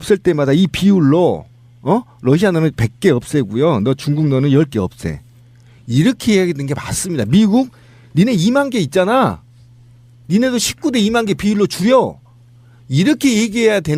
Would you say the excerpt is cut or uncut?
cut